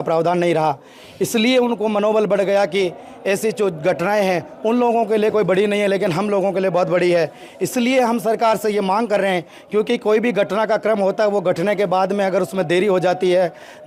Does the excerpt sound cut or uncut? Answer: uncut